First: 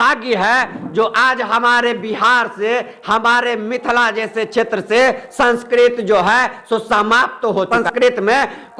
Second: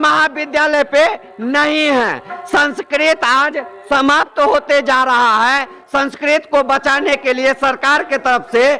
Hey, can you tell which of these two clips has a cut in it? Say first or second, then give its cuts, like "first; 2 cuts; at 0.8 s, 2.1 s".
first; 1 cut; at 7.7 s